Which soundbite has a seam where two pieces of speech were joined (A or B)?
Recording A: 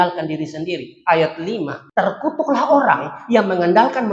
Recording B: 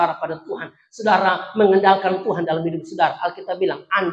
A